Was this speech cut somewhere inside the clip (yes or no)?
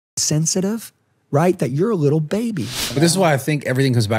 yes